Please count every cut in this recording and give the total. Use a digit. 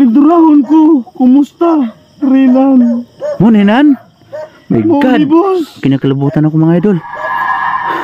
1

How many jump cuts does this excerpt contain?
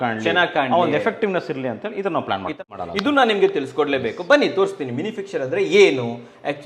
1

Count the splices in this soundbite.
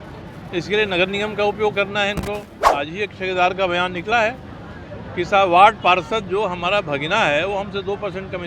1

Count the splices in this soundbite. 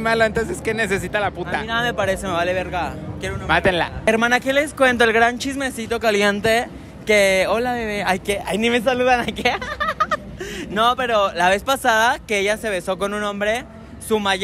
0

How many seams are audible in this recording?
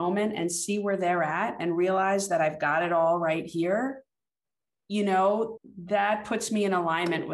1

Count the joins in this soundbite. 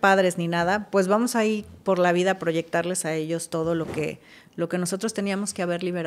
0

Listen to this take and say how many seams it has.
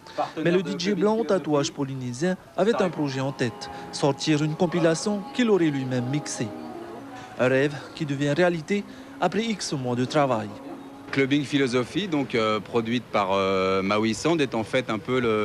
1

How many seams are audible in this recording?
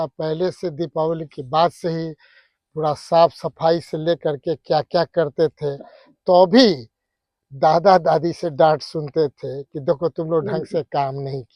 0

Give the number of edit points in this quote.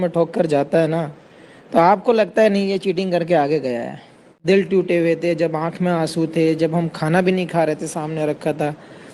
1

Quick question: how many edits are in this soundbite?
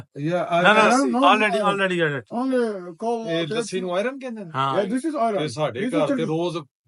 0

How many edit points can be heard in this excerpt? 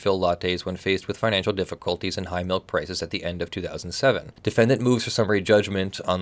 1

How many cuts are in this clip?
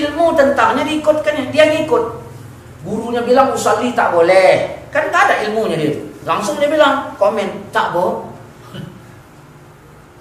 0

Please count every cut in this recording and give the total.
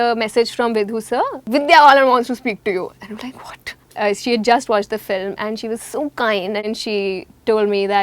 3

